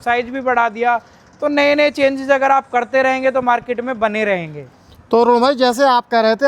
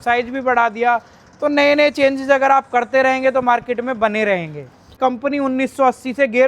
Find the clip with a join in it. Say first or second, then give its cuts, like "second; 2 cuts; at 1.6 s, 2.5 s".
second; 1 cut; at 5.0 s